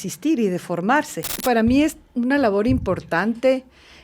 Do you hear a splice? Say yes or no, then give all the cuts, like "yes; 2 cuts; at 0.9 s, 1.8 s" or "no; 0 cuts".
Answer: yes; 1 cut; at 1.3 s